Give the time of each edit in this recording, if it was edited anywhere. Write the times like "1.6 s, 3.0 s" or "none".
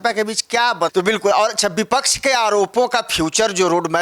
0.9 s

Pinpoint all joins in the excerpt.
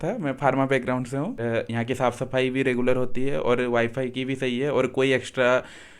1.4 s

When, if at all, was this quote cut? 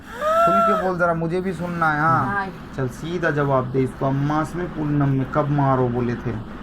2.3 s

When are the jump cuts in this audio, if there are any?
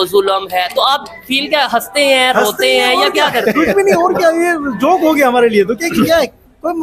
none

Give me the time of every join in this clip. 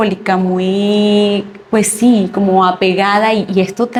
none

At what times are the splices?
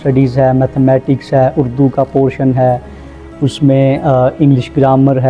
none

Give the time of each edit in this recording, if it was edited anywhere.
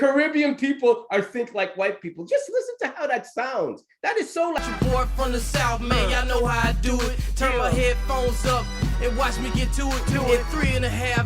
4.6 s

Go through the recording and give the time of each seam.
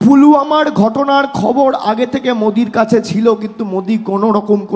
none

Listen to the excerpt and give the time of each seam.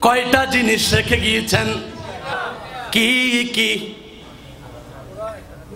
2.3 s

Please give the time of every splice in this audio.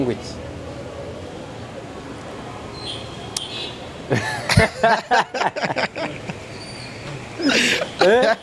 none

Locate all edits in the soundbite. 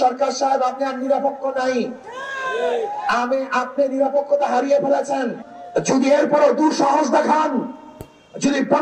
5.4 s

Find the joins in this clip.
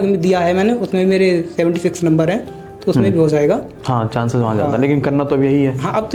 none

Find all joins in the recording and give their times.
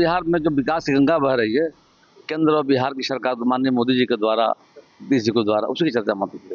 none

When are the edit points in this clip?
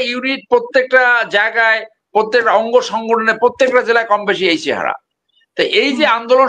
none

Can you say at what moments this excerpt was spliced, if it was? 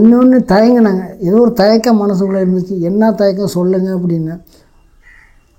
none

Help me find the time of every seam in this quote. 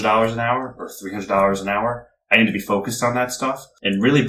none

